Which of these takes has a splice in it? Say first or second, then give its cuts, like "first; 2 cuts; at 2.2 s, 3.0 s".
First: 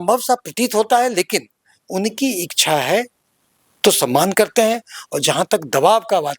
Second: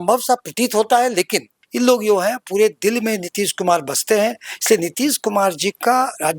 second; 1 cut; at 1.6 s